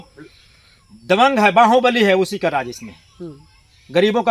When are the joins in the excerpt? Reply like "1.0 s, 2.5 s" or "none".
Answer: none